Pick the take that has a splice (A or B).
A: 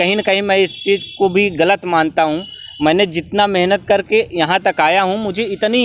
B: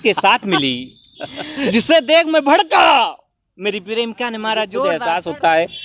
B